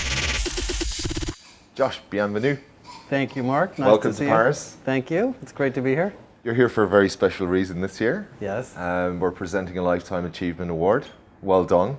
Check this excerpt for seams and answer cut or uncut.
cut